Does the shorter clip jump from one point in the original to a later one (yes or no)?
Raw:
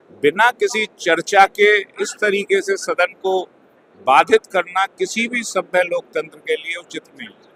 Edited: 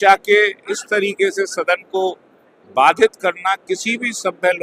no